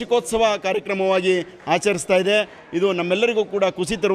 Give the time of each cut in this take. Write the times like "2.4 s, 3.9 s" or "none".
none